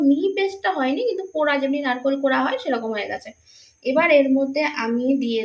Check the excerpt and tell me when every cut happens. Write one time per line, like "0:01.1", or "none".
none